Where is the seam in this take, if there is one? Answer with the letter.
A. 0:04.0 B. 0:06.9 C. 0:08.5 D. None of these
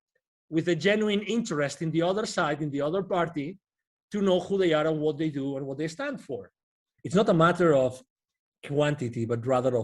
B